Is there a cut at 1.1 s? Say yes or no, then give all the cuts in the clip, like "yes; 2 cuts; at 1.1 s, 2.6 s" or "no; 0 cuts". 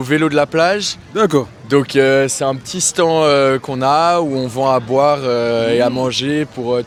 no; 0 cuts